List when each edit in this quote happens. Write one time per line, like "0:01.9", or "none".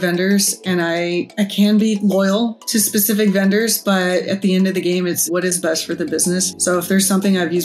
0:01.3
0:05.2
0:06.5